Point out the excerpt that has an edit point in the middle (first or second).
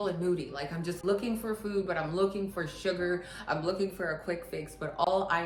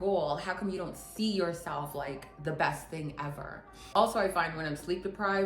second